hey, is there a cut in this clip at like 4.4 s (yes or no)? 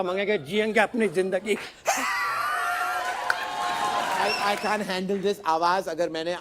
yes